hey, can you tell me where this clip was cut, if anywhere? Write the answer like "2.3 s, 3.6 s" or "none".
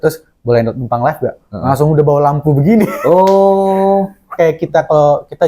4.3 s